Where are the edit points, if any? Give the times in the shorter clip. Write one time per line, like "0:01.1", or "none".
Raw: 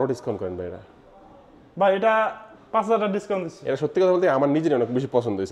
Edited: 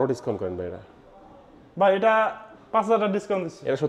none

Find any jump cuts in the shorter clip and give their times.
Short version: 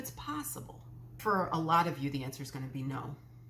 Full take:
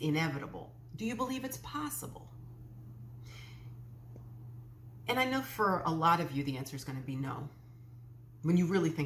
0:01.2

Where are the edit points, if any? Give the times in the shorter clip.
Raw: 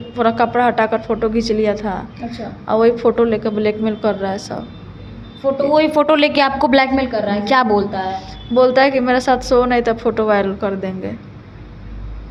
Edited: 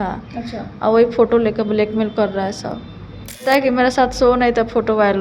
0:03.4

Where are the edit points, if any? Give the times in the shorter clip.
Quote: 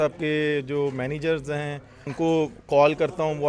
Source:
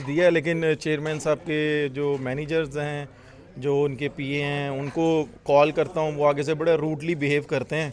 0:02.1

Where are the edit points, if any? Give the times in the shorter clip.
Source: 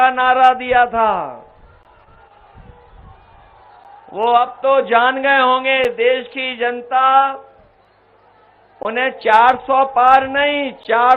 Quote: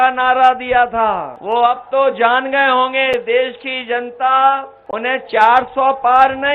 0:01.3
0:04.8

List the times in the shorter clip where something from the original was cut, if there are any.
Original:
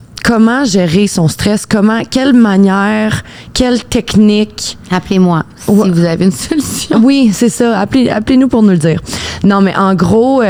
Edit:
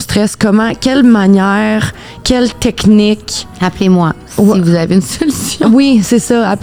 none

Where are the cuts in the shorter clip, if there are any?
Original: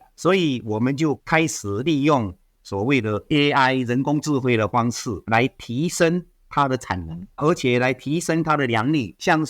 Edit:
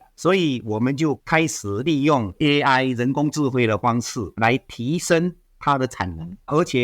0:02.3

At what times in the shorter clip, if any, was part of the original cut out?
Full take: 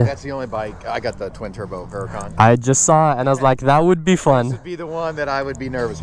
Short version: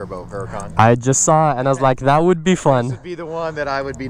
none

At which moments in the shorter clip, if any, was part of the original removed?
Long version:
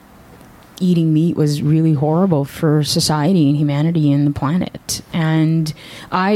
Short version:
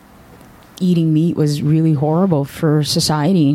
none

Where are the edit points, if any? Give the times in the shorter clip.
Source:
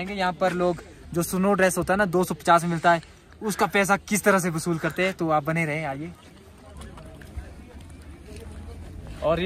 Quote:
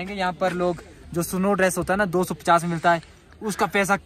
none

